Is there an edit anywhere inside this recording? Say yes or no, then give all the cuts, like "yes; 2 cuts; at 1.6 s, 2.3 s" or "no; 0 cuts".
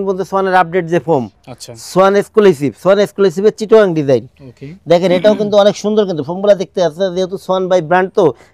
no; 0 cuts